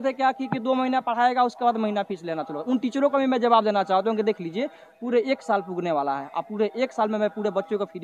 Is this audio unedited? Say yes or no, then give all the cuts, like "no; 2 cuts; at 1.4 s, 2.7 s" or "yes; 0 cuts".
yes; 0 cuts